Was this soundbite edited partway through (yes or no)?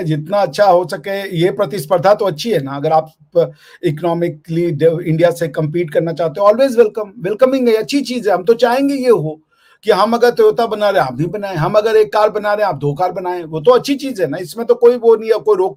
no